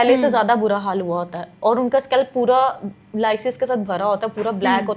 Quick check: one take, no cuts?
yes; 0 cuts

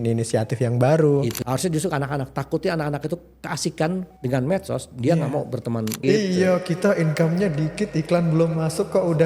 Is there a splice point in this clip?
yes; 3 cuts; at 1.4 s, 4.1 s, 6.0 s

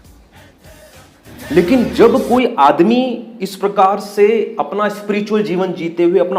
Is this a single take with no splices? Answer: no; 1 cut; at 1.3 s

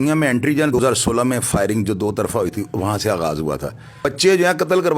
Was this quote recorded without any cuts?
no; 2 cuts; at 0.8 s, 4.0 s

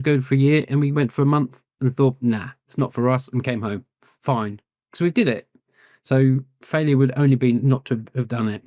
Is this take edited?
no; 0 cuts

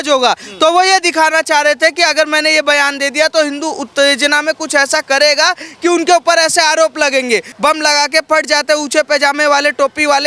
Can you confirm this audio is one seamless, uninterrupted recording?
no; 1 cut; at 7.5 s

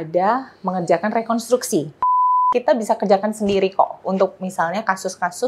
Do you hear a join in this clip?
yes; 1 cut; at 2.3 s

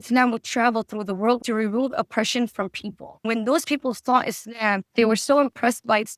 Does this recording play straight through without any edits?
no; 3 cuts; at 1.4 s, 3.3 s, 4.8 s

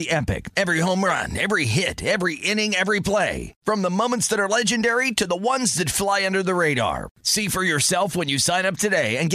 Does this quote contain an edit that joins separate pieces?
no; 0 cuts

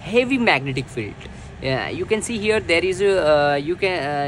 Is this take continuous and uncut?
yes; 0 cuts

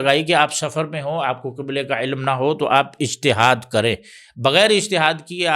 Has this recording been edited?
no; 0 cuts

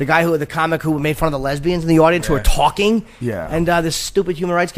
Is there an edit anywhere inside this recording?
yes; 1 cut; at 1.5 s

